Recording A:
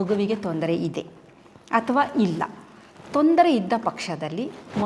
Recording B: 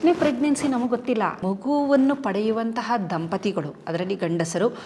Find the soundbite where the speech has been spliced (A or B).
B